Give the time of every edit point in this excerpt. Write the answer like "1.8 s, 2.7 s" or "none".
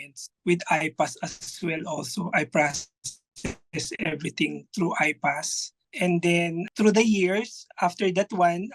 5.9 s